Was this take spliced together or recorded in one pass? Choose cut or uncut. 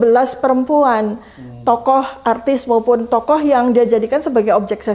uncut